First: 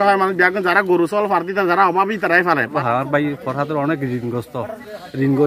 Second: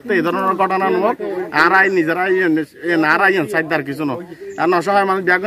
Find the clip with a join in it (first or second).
first